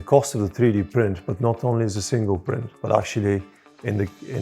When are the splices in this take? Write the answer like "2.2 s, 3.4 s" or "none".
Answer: 2.7 s